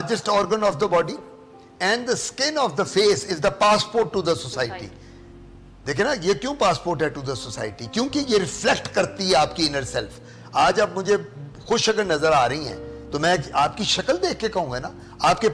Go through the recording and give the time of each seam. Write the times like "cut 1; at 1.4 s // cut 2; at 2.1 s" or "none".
none